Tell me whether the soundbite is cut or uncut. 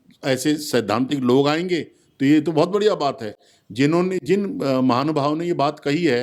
uncut